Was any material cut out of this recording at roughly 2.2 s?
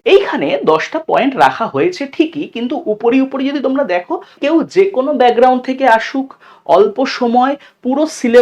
no; 1 cut; at 4.4 s

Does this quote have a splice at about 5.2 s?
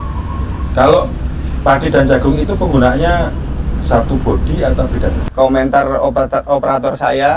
yes; 1 cut; at 5.2 s

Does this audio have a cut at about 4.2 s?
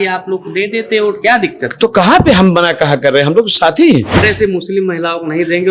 yes; 1 cut; at 4.2 s

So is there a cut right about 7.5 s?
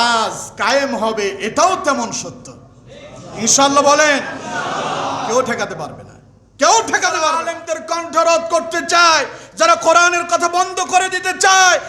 yes; 1 cut; at 7.5 s

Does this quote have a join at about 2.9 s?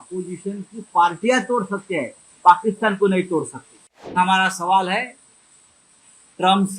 no; 1 cut; at 4.2 s

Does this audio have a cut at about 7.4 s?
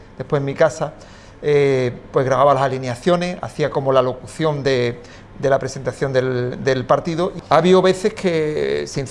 yes; 1 cut; at 7.4 s

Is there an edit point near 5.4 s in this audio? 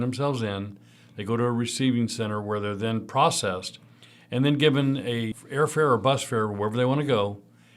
yes; 1 cut; at 5.4 s

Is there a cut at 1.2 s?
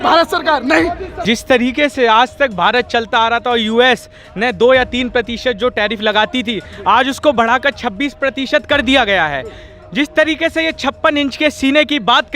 yes; 1 cut; at 1.2 s

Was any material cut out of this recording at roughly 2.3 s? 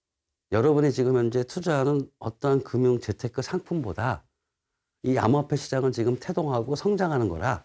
no; 0 cuts

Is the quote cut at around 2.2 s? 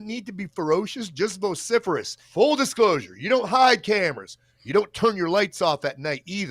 yes; 1 cut; at 2.2 s

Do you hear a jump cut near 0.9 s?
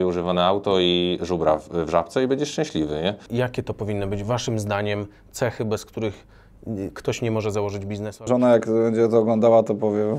no; 2 cuts; at 3.2 s, 8.3 s

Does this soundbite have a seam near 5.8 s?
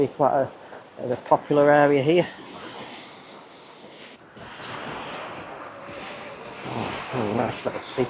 no; 1 cut; at 4.1 s

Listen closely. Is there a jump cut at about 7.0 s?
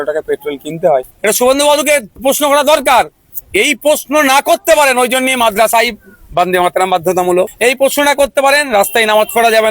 no; 1 cut; at 1.1 s

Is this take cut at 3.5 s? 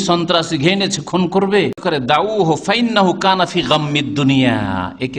no; 1 cut; at 1.8 s

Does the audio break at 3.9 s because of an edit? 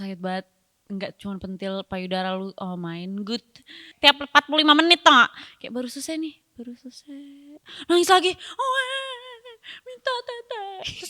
yes; 1 cut; at 3.9 s

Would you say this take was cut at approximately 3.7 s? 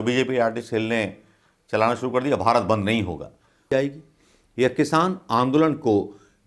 yes; 1 cut; at 3.7 s

